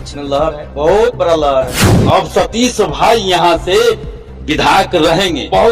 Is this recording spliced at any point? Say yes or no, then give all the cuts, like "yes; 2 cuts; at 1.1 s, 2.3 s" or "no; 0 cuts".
yes; 1 cut; at 1.9 s